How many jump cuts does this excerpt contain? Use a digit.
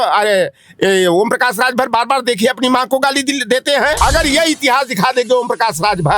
1